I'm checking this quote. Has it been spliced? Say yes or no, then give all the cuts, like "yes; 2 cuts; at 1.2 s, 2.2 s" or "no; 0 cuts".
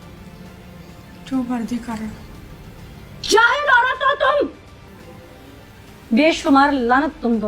yes; 1 cut; at 4.9 s